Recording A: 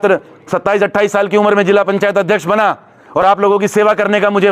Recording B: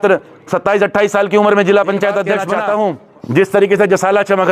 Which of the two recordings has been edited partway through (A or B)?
B